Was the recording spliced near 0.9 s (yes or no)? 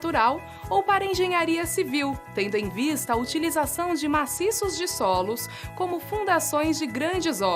yes